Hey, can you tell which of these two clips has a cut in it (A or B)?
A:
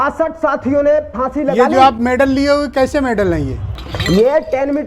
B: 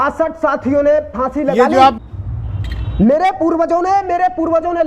B